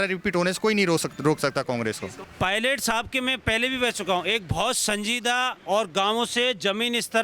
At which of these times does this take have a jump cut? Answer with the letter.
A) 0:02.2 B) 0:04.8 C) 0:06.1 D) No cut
A